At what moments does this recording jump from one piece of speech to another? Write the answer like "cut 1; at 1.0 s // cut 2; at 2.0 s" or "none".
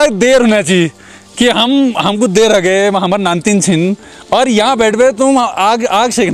none